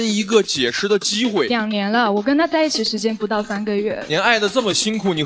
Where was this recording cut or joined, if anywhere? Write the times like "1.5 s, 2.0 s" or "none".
1.5 s, 4.1 s